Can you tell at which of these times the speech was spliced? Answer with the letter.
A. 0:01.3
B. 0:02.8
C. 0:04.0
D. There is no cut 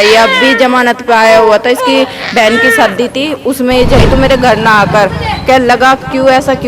C